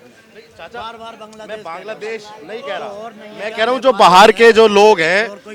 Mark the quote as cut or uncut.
uncut